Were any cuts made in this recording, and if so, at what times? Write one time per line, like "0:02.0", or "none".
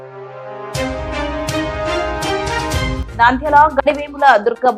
0:03.0